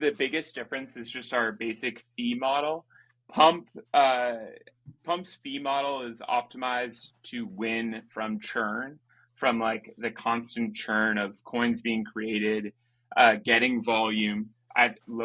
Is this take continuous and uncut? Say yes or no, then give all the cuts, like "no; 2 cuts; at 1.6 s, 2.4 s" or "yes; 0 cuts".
yes; 0 cuts